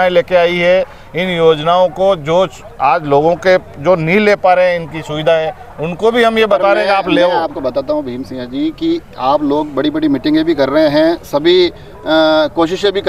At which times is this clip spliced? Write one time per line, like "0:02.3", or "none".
none

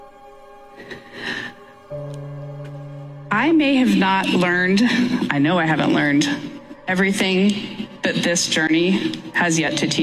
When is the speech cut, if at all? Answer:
none

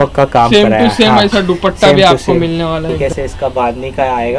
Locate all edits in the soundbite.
0:03.0

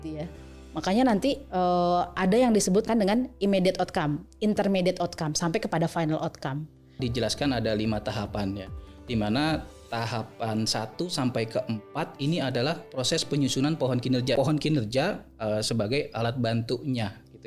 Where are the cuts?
0:02.9
0:07.0
0:14.4

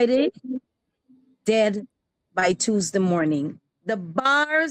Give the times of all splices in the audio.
0:03.7

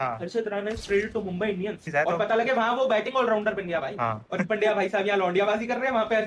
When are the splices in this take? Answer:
0:01.8
0:04.2

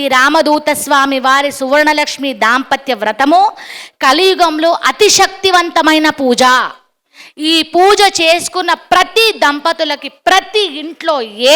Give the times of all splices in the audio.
none

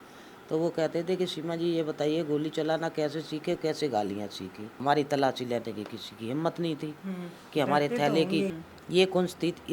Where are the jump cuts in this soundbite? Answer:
0:04.8
0:08.6

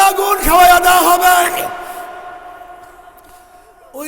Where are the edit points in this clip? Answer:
none

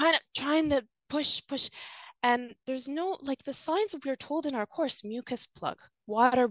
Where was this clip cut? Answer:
none

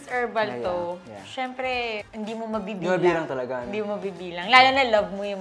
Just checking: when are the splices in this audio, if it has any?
none

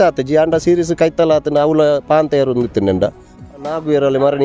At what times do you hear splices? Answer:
0:03.5

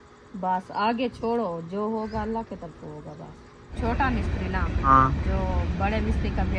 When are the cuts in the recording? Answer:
0:03.7
0:04.9

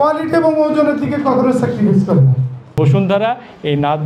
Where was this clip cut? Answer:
0:02.7

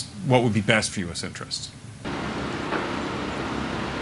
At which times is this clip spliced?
none

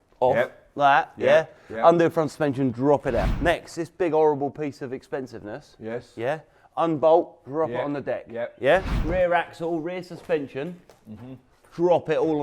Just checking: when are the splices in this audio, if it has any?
0:03.3
0:08.9

